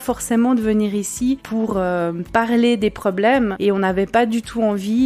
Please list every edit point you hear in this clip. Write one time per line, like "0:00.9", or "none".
0:01.4